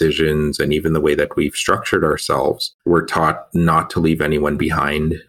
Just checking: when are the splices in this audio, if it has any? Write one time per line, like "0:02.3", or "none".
0:02.7